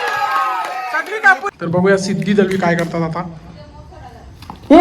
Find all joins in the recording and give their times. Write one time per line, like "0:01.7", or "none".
0:01.5

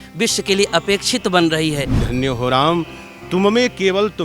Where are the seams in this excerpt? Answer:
0:02.0

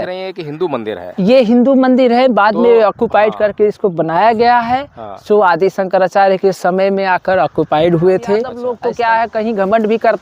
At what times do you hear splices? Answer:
0:08.6

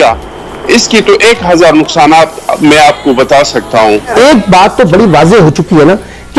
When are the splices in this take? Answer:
0:04.1

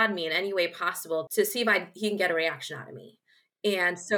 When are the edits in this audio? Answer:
0:01.3

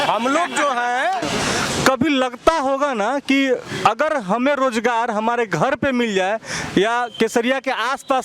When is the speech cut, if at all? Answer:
0:01.2

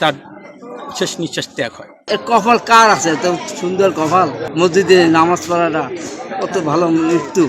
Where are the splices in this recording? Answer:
0:01.9
0:04.4

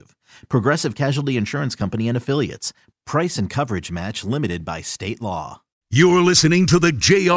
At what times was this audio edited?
0:05.8

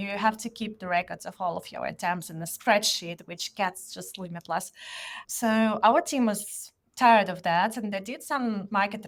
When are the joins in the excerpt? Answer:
none

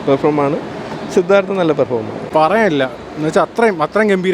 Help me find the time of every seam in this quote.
0:02.2

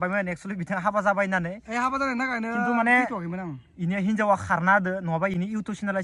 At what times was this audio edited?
none

